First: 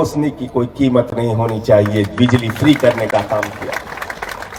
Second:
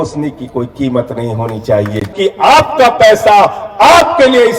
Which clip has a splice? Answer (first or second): second